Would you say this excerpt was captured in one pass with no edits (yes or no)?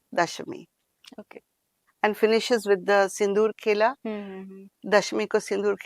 yes